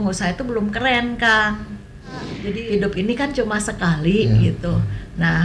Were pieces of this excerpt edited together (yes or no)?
yes